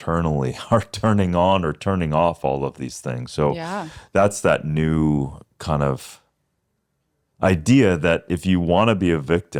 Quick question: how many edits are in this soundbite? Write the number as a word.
zero